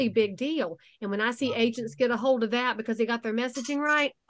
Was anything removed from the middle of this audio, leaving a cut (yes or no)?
no